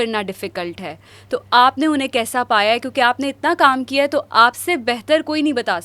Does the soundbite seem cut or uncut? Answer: uncut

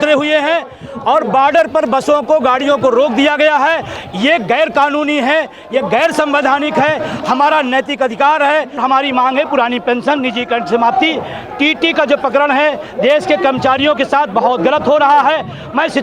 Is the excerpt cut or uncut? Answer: cut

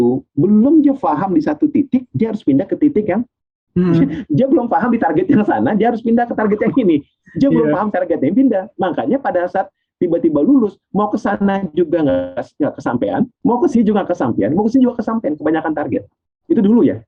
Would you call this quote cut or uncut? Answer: uncut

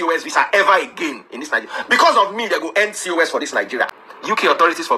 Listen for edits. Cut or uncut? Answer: cut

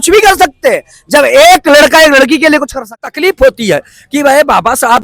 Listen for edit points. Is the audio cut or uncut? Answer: cut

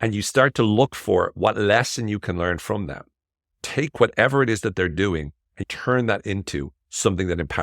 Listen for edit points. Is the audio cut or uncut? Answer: cut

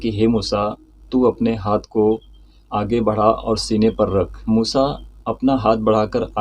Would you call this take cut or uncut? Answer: cut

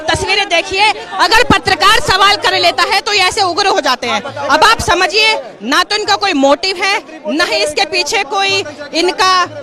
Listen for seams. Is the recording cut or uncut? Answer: uncut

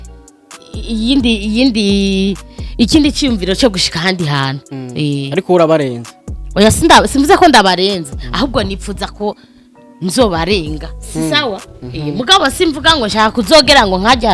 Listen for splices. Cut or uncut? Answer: uncut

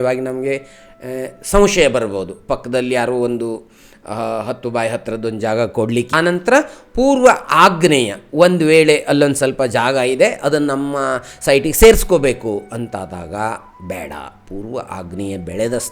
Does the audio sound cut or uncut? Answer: cut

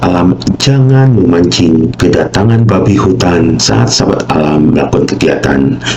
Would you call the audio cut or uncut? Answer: cut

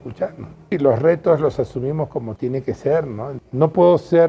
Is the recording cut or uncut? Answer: cut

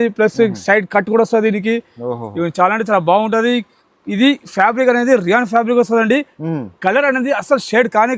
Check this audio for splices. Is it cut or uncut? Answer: uncut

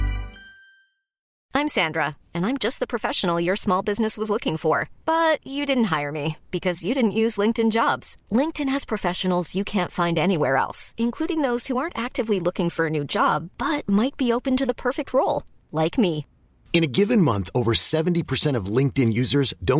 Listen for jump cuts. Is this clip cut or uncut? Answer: cut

